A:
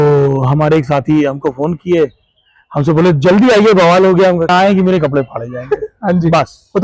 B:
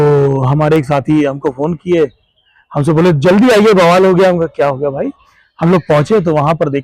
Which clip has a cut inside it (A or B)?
A